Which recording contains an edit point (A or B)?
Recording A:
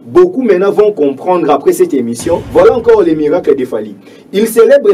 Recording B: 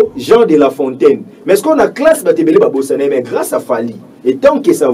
A